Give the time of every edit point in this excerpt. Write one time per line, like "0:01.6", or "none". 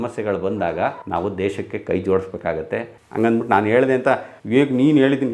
0:02.9